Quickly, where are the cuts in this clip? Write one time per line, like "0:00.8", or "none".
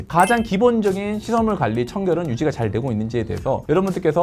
none

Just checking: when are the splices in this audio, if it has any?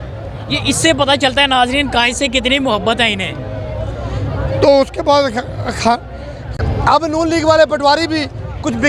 0:06.6

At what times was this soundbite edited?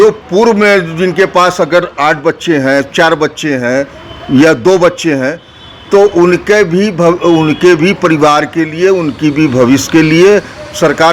none

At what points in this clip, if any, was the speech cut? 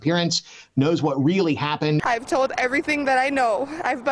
0:02.0

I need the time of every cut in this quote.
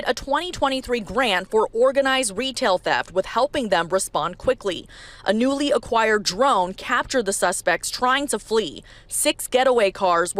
none

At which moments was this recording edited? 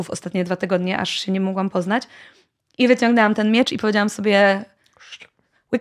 none

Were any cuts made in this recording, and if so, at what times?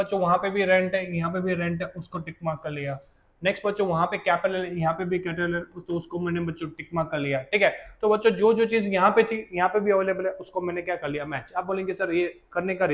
none

